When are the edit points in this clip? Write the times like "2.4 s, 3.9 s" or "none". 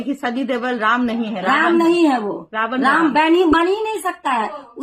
none